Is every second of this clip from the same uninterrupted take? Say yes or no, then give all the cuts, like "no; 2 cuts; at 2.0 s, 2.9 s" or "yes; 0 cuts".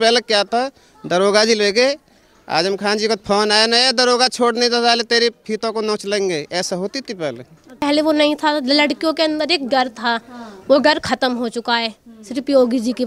no; 1 cut; at 7.8 s